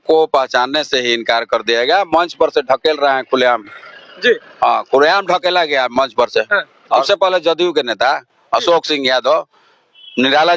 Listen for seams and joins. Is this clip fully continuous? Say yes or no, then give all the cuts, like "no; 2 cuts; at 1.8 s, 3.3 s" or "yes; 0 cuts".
no; 1 cut; at 7.1 s